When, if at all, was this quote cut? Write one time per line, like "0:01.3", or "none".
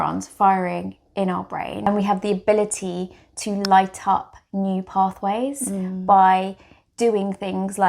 0:01.9

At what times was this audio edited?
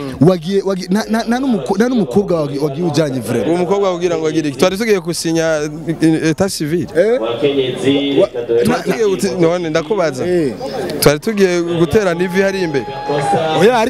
none

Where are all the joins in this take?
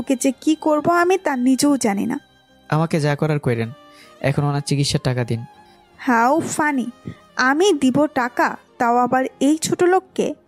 none

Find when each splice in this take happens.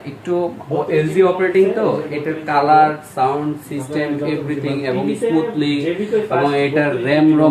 none

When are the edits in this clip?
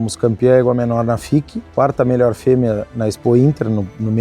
0:01.7

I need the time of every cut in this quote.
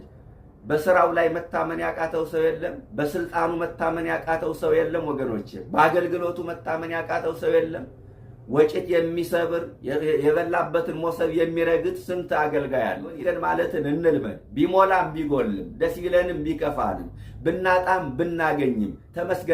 0:13.2

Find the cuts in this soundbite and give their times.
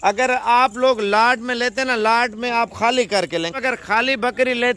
0:03.5

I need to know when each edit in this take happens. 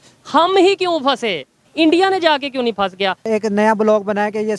0:01.6
0:03.3

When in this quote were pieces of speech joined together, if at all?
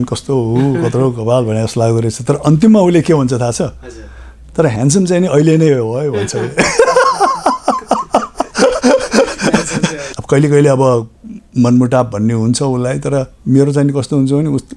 0:10.1

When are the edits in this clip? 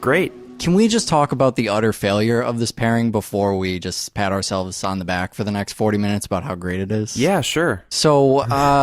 0:03.3

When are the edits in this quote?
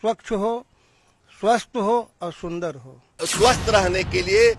0:03.2

